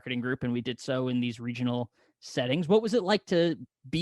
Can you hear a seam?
no; 0 cuts

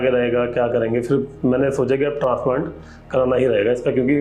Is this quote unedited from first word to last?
yes; 0 cuts

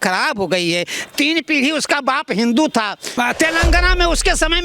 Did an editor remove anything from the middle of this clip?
yes; 1 cut; at 3.0 s

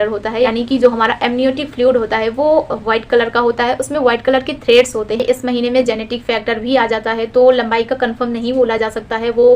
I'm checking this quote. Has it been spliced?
yes; 1 cut; at 5.2 s

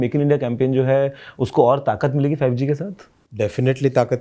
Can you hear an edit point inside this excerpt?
no; 0 cuts

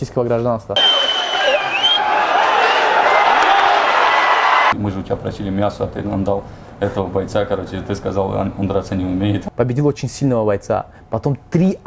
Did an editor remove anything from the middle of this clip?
yes; 3 cuts; at 0.7 s, 4.7 s, 9.4 s

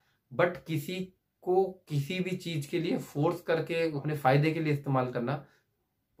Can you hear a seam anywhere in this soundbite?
yes; 1 cut; at 4.0 s

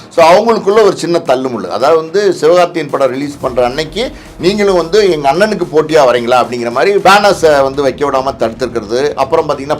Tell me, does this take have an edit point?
yes; 1 cut; at 7.0 s

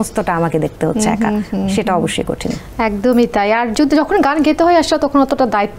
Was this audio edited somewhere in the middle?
no; 0 cuts

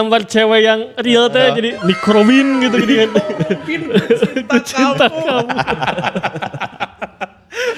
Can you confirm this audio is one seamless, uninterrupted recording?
yes; 0 cuts

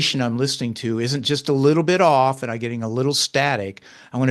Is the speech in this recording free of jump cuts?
yes; 0 cuts

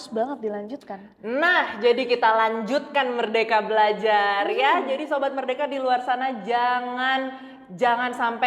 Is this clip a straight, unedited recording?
yes; 0 cuts

